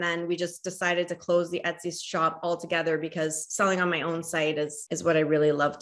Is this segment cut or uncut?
cut